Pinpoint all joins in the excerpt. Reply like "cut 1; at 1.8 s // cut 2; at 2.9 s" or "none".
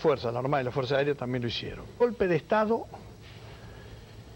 none